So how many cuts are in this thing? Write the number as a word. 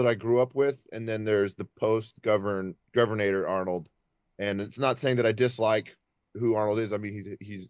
zero